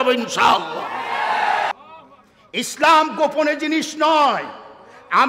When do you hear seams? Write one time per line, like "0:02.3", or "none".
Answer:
0:01.7